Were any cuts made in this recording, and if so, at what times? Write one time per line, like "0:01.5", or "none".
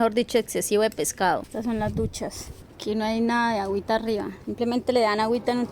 0:01.5